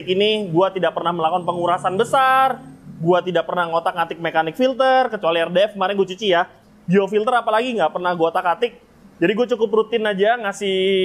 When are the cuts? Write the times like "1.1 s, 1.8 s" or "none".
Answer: none